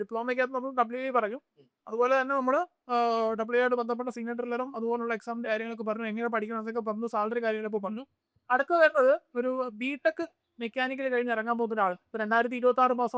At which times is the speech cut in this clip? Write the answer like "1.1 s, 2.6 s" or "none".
none